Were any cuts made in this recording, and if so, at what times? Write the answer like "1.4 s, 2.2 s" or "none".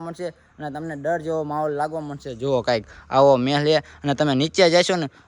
none